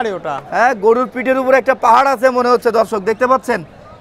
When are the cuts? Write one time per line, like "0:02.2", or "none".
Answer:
none